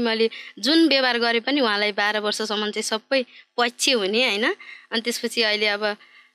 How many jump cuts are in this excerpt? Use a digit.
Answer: 0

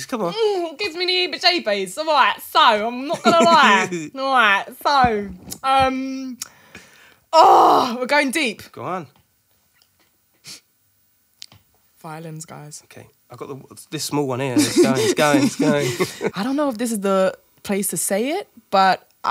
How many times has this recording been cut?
1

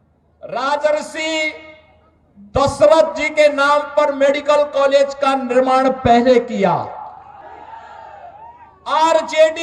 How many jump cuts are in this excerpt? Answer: 1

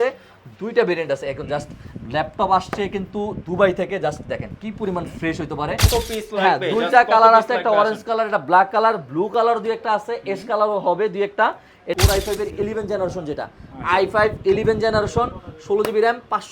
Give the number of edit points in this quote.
2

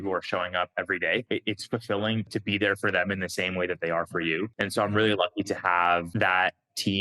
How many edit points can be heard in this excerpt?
4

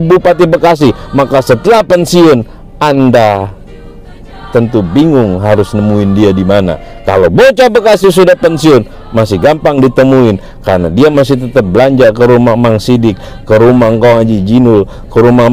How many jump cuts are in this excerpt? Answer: 0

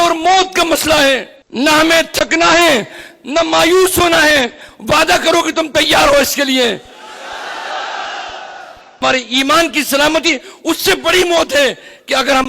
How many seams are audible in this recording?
2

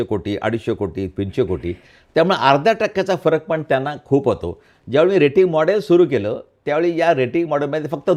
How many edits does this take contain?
0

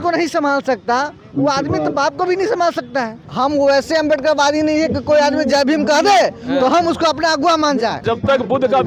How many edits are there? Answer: 2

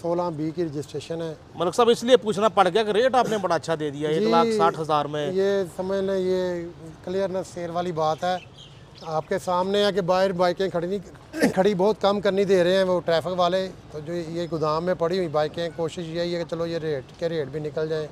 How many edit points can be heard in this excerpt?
1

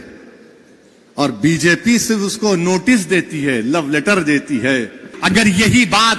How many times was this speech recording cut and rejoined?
1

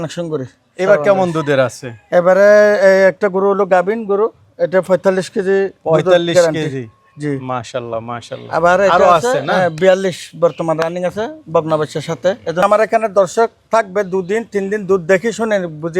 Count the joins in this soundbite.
1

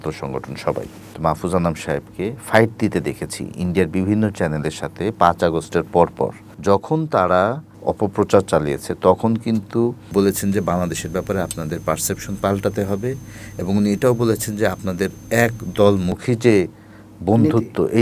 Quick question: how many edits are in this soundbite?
4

